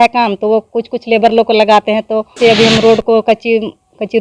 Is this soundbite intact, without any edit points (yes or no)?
no